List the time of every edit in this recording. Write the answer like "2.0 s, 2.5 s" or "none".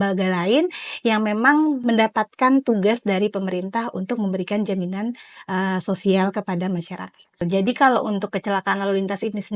7.4 s